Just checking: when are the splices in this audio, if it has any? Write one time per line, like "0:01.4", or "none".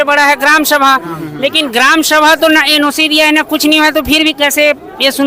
none

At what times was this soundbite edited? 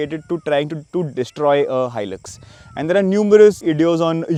none

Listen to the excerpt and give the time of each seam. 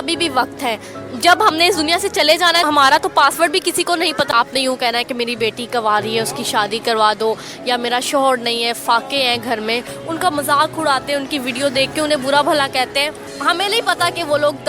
0:02.6
0:04.3
0:10.0
0:13.2

